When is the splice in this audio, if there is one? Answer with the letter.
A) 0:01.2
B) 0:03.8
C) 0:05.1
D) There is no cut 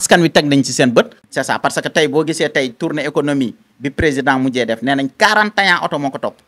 A